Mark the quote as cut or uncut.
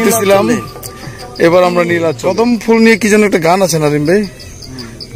cut